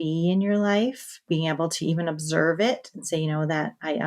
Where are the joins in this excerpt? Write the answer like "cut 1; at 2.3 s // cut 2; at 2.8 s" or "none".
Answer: cut 1; at 1.3 s

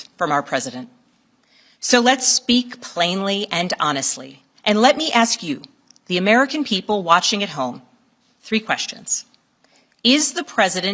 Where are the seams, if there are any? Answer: none

